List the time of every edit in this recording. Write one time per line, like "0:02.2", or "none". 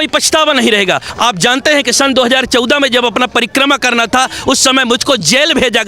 0:01.1